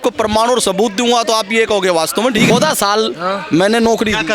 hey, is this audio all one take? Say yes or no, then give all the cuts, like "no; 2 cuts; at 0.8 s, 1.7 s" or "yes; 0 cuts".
no; 1 cut; at 2.5 s